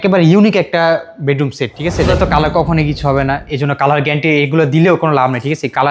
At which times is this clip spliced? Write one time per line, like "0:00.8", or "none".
0:02.1